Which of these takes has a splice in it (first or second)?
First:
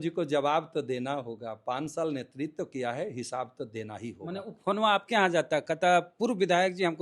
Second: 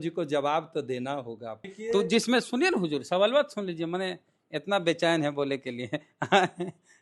second